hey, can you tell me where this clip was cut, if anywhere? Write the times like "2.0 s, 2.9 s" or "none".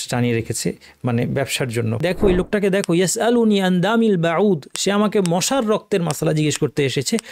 2.0 s